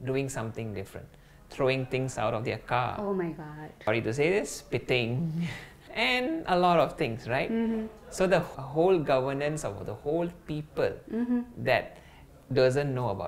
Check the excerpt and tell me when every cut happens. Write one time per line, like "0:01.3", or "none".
0:03.9
0:05.8
0:08.5